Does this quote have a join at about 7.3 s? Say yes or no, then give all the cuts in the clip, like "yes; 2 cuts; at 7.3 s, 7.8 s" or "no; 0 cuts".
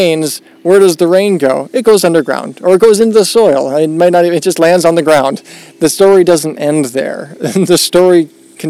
no; 0 cuts